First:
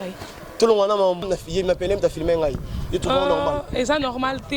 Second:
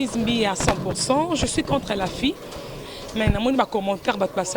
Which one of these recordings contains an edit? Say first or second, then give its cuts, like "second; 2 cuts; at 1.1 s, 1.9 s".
first; 1 cut; at 1.3 s